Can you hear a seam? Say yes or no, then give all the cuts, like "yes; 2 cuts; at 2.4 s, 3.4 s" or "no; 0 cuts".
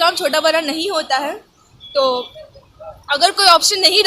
no; 0 cuts